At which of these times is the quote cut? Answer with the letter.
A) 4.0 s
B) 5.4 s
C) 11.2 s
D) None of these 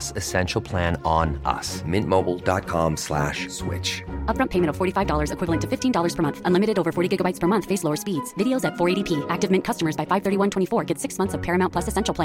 D